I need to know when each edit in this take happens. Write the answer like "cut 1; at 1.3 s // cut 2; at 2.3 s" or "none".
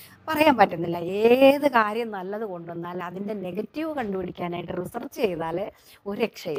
none